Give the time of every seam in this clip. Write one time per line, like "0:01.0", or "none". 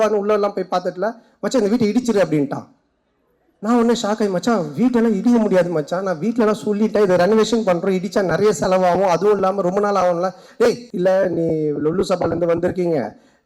0:10.9